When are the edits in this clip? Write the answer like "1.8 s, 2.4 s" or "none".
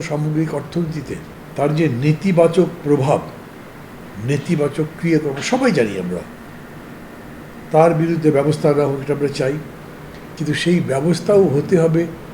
1.4 s